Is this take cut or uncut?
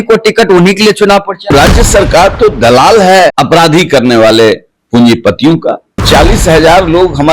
cut